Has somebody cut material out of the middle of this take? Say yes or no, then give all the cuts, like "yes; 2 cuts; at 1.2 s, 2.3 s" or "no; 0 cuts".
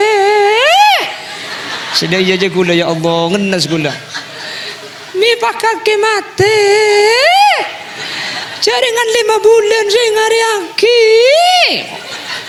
no; 0 cuts